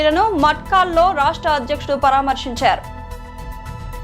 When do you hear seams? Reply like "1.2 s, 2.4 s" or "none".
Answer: 2.8 s